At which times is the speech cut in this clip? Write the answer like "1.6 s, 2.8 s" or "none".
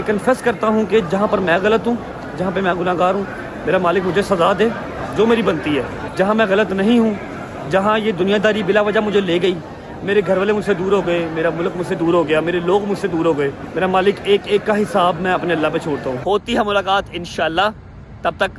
6.0 s, 13.6 s, 16.2 s